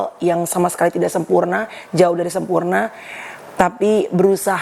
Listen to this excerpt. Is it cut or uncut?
uncut